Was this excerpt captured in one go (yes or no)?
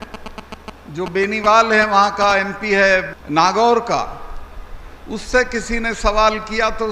no